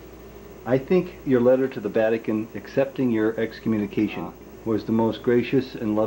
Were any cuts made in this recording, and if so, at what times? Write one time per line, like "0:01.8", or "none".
0:04.4